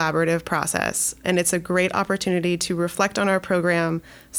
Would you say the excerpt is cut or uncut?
cut